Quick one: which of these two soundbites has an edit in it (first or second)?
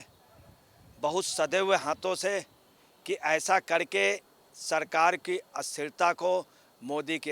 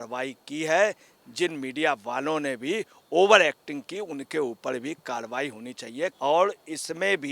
second